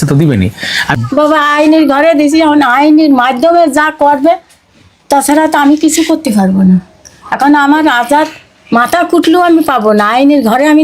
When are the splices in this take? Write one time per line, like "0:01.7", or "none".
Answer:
0:00.9